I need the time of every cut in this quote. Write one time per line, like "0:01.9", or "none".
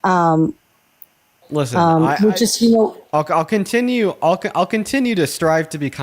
0:01.4

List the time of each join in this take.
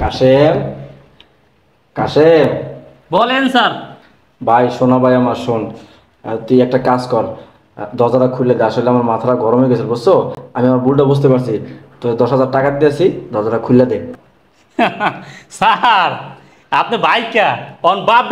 none

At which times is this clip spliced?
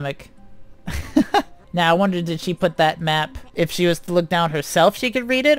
0:01.6
0:03.4

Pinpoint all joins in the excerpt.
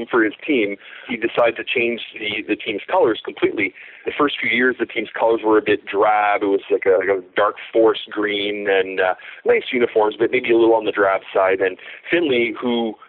0:01.0
0:04.0

